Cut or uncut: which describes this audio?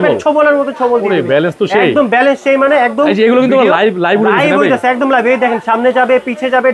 uncut